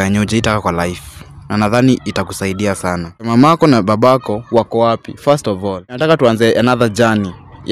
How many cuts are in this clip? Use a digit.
2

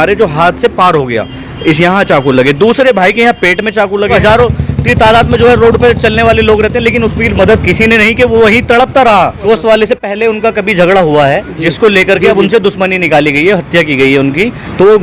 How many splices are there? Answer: 2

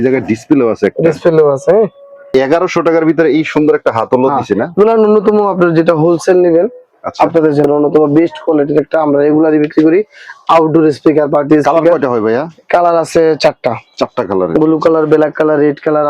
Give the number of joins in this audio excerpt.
2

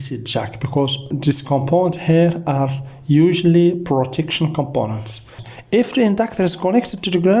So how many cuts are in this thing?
2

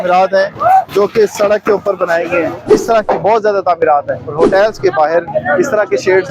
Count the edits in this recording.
2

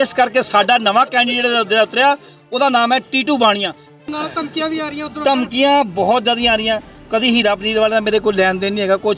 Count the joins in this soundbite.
1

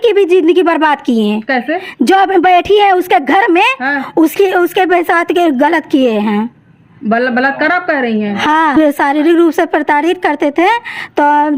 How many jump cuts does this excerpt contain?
1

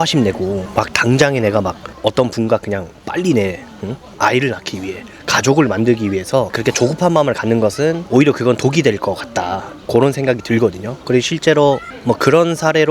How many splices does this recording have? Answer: 3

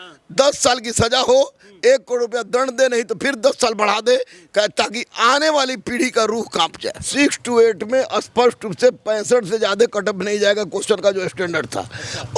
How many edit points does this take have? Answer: 1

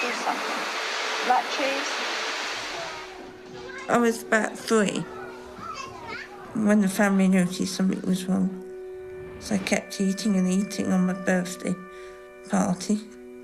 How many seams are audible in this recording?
1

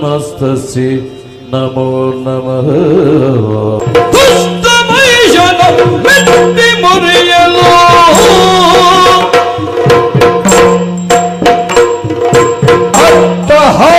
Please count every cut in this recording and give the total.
1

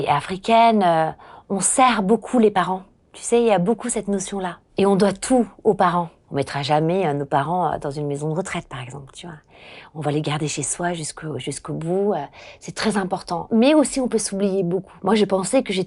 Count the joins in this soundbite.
3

